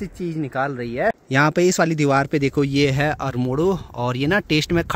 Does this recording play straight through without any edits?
yes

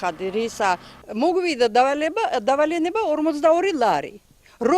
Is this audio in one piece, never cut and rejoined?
no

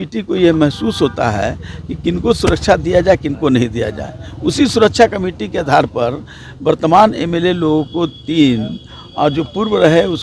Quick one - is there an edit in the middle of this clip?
no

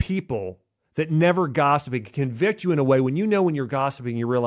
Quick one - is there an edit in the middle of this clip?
no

